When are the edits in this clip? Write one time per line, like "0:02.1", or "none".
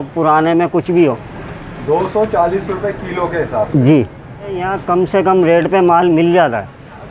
0:04.7